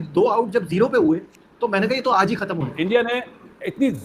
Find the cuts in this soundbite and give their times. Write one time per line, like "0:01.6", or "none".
0:02.7